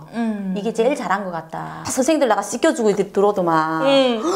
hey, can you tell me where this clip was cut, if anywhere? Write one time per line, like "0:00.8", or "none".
0:01.8